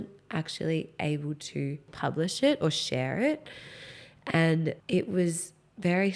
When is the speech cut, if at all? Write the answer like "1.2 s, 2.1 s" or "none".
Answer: 1.9 s, 4.8 s